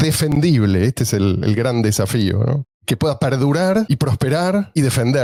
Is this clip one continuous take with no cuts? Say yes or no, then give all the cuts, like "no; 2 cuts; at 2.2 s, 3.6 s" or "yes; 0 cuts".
yes; 0 cuts